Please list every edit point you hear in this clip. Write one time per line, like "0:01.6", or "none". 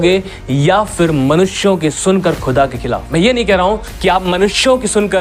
0:03.0